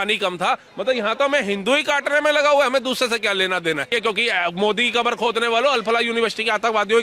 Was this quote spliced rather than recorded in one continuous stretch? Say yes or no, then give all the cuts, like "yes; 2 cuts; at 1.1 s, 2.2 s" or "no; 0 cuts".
yes; 1 cut; at 3.9 s